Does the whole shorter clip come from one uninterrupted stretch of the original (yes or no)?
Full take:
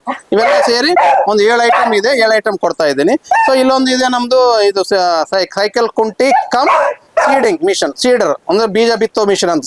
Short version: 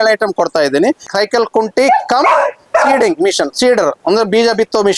no